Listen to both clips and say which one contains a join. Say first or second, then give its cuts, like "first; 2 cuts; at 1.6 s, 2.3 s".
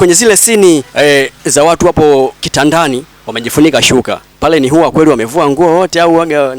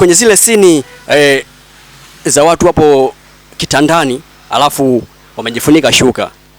first; 3 cuts; at 0.9 s, 2.9 s, 4.2 s